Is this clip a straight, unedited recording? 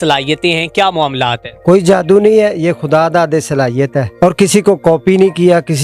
no; 2 cuts; at 1.5 s, 4.1 s

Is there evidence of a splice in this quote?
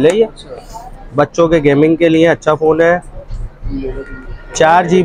no; 0 cuts

